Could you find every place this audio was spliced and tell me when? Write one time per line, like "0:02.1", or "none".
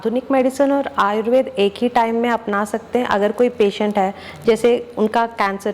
none